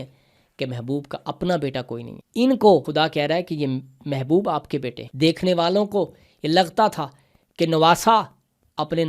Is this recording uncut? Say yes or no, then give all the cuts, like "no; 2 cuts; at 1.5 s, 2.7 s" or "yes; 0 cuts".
no; 3 cuts; at 2.2 s, 2.9 s, 5.0 s